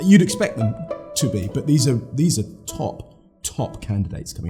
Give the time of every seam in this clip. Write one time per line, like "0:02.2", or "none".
none